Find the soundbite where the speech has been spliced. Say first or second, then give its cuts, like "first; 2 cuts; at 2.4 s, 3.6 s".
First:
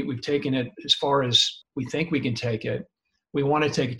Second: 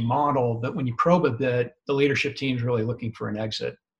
first; 1 cut; at 1.5 s